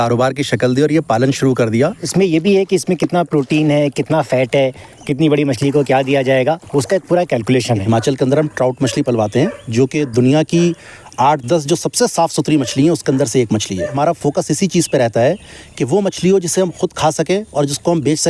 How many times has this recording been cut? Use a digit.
3